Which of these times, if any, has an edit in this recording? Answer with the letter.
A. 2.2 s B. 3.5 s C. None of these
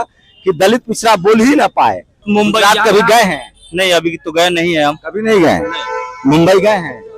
A